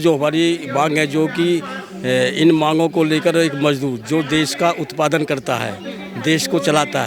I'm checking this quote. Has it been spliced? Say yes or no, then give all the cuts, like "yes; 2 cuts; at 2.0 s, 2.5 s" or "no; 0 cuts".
no; 0 cuts